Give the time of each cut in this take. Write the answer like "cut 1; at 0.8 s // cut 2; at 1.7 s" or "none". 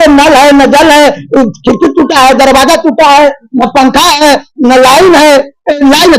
none